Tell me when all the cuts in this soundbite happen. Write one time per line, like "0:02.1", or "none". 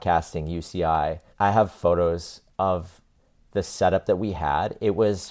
0:01.3